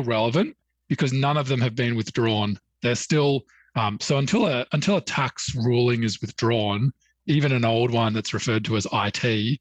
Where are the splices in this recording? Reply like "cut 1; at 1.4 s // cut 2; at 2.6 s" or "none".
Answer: none